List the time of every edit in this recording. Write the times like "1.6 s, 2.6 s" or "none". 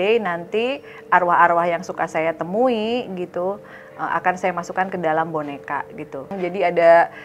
6.3 s